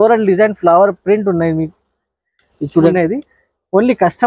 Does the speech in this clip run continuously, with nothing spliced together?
no; 1 cut; at 2.9 s

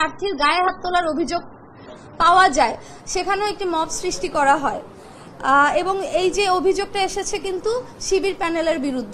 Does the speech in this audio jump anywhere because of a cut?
no; 0 cuts

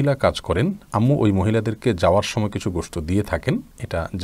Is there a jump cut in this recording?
no; 0 cuts

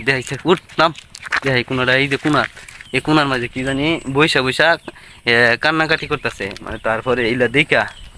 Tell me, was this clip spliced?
no; 0 cuts

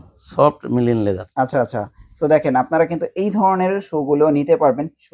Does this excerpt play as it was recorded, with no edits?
yes; 0 cuts

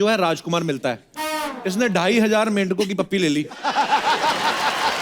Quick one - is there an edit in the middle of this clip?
no; 0 cuts

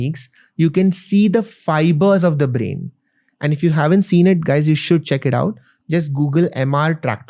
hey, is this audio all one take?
yes; 0 cuts

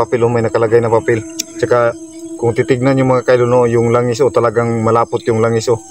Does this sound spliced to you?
no; 0 cuts

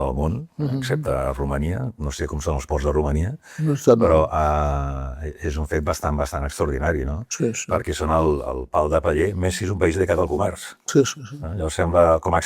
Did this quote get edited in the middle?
no; 0 cuts

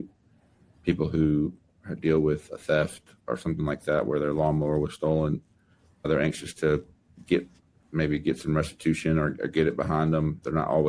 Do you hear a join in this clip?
yes; 2 cuts; at 3.2 s, 6.0 s

